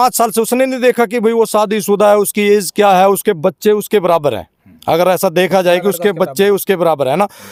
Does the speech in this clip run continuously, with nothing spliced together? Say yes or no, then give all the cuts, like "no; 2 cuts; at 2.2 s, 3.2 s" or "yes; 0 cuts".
yes; 0 cuts